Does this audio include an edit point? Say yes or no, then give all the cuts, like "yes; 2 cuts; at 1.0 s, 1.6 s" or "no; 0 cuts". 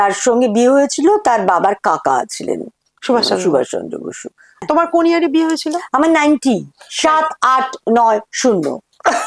yes; 1 cut; at 4.6 s